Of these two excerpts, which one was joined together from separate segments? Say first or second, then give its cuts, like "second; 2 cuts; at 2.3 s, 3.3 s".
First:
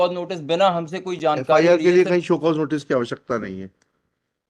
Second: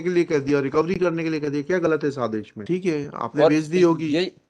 second; 1 cut; at 2.6 s